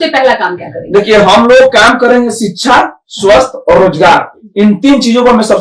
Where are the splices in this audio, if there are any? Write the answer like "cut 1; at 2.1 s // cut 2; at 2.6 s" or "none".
none